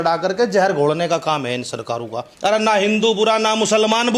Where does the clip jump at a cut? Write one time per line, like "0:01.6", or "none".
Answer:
0:02.2